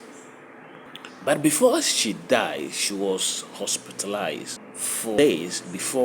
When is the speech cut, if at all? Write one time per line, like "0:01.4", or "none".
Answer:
0:05.1